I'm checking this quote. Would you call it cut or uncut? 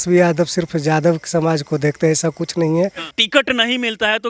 cut